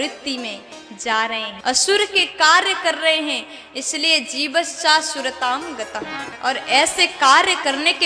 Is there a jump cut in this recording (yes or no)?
yes